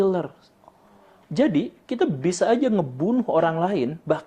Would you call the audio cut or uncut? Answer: cut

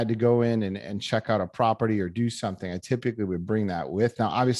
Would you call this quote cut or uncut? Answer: uncut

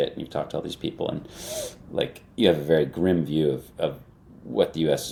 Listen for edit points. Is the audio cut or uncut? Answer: uncut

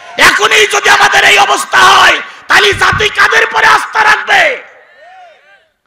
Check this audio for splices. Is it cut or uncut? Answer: uncut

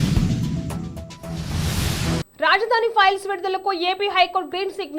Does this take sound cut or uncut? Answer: cut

